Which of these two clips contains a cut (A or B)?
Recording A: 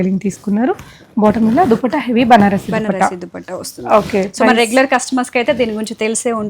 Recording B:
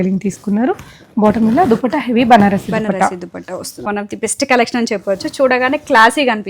B